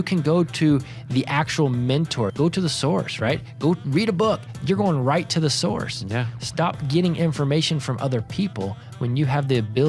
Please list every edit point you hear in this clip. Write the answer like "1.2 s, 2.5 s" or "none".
2.3 s